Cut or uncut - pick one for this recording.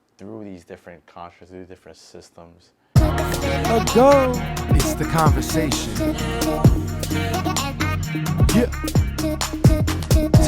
cut